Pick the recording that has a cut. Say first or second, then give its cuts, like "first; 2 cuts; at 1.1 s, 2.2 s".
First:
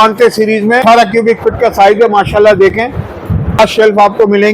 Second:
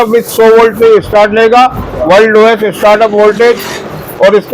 first; 2 cuts; at 0.8 s, 3.6 s